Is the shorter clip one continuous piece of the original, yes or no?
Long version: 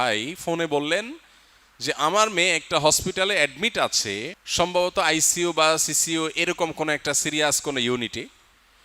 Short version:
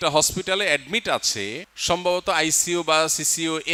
yes